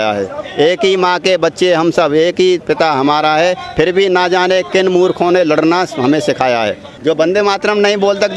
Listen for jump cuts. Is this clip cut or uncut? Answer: cut